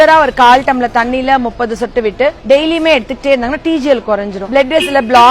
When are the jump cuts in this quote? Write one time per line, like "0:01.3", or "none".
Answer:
0:02.4
0:04.4